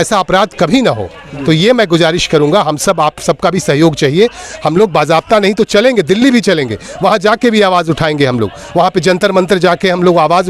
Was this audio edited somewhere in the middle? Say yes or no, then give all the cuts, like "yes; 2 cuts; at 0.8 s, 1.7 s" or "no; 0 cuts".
no; 0 cuts